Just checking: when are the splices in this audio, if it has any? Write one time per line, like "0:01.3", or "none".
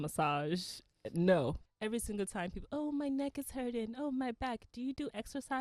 0:01.6